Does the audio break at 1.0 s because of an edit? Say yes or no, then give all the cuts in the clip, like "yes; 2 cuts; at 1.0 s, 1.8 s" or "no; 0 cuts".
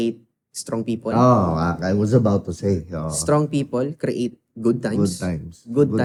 no; 0 cuts